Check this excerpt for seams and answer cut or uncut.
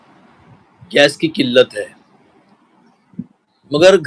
uncut